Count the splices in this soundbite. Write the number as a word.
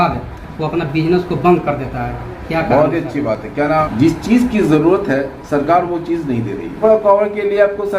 two